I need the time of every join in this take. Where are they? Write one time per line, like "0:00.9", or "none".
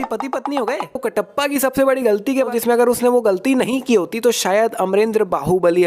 0:01.0
0:02.5